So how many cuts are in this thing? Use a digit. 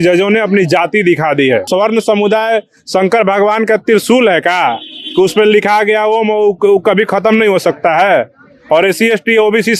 1